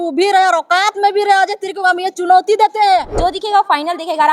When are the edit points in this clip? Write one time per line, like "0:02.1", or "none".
0:03.2